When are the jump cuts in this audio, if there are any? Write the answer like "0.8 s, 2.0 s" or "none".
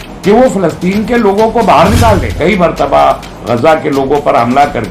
2.3 s